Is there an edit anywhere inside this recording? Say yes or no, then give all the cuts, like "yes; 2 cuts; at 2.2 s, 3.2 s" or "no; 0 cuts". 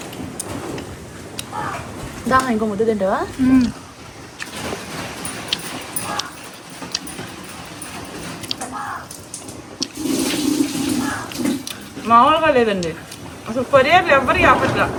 no; 0 cuts